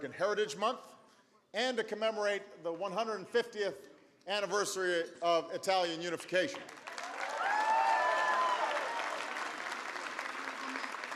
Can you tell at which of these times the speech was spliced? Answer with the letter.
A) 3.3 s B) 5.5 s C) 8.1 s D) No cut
B